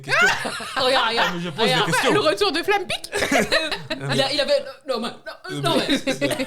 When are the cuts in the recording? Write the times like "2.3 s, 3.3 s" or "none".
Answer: none